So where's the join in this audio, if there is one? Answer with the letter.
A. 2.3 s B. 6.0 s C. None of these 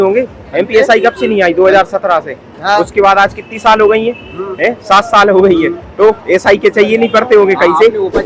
C